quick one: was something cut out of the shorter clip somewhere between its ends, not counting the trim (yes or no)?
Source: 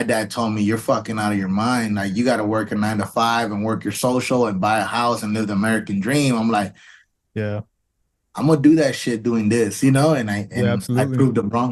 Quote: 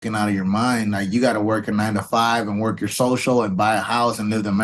no